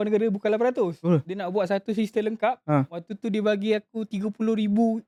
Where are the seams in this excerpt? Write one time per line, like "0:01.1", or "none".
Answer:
none